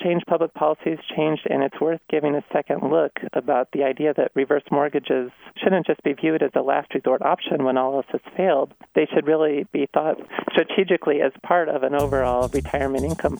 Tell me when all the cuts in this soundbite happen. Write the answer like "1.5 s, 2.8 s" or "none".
5.4 s, 8.8 s, 10.3 s